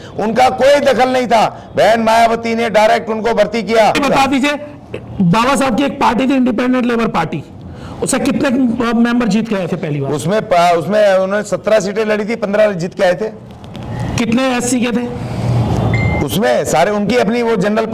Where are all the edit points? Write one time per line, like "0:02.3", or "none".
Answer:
0:04.0